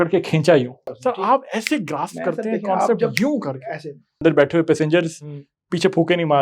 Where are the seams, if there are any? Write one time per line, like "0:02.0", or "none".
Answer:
0:00.9
0:04.2

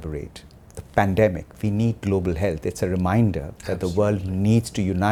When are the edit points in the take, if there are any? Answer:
none

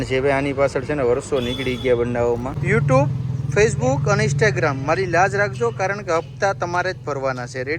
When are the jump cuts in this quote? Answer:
0:02.6

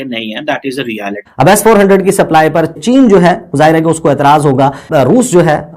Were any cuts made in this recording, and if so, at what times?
0:01.2
0:02.8
0:04.9

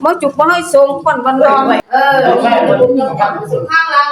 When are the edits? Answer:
0:01.8

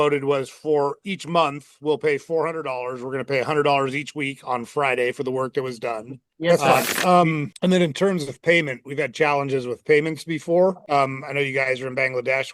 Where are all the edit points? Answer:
0:06.5

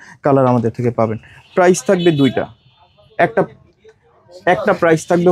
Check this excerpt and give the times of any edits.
none

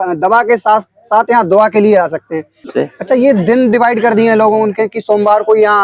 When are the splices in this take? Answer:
0:02.6

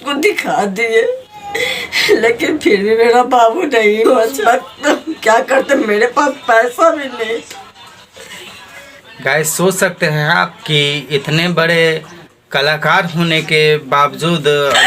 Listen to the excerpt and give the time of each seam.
0:04.1

